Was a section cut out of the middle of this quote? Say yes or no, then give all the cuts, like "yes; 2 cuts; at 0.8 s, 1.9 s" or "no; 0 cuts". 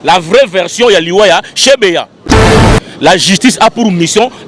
yes; 1 cut; at 2.5 s